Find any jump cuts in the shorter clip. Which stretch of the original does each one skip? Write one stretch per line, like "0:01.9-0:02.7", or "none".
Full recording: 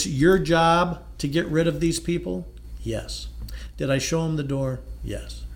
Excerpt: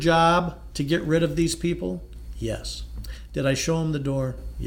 none